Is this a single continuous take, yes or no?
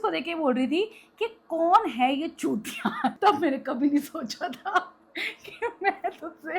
no